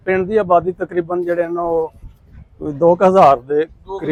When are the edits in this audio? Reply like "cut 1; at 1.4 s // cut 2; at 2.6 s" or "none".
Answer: none